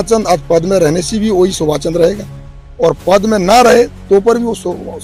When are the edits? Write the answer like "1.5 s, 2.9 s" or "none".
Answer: none